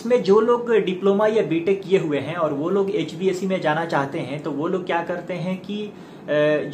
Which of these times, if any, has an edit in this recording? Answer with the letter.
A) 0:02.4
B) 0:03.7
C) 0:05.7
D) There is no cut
D